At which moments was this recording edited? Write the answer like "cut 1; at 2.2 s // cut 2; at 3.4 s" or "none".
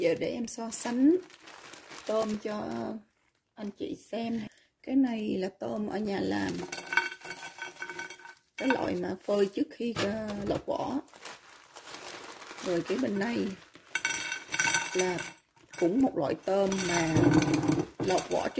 cut 1; at 4.5 s